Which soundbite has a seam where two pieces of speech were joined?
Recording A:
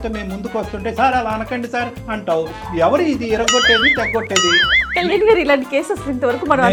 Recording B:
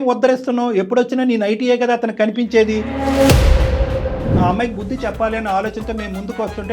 B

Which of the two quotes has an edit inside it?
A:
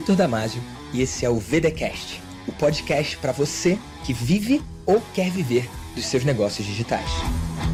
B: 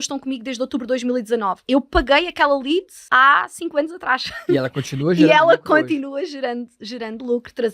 B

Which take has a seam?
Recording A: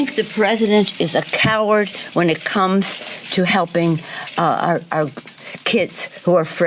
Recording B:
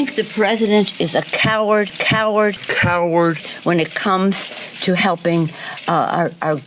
A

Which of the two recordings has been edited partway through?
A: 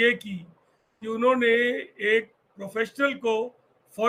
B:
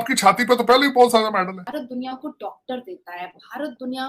B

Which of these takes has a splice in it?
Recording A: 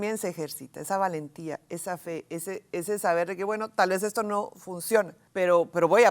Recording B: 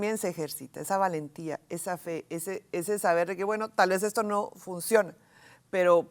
A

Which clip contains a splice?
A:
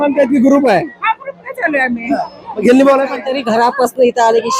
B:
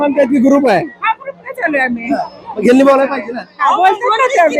A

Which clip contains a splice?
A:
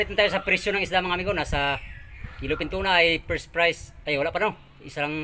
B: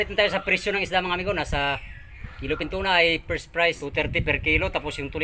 B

